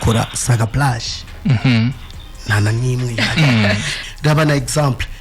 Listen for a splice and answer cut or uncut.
cut